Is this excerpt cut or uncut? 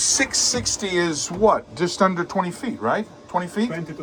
uncut